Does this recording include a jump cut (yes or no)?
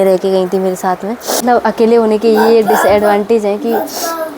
yes